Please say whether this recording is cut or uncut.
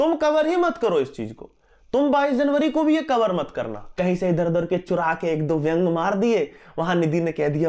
cut